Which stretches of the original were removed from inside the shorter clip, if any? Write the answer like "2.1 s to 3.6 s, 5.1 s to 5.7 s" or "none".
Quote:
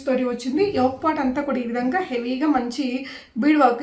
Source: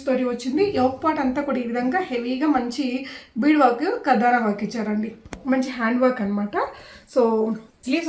none